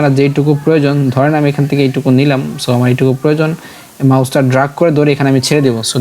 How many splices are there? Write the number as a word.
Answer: zero